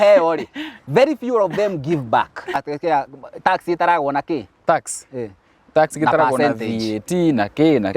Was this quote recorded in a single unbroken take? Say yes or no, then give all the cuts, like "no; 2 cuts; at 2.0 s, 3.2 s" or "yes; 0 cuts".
no; 1 cut; at 2.6 s